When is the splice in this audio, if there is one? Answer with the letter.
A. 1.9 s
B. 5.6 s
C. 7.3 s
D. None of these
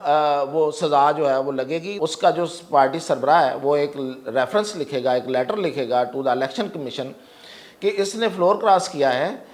A